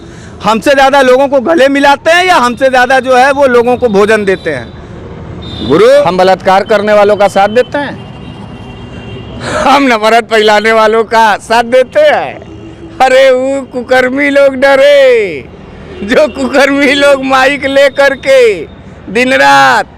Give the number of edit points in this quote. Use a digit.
1